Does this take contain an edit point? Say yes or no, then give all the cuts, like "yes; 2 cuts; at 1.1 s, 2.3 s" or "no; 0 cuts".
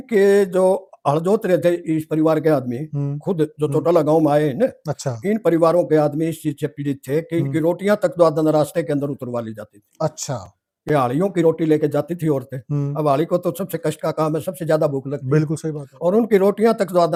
no; 0 cuts